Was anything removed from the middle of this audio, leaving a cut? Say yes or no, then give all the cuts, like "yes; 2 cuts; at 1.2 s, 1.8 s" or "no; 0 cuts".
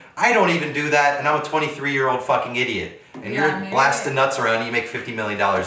no; 0 cuts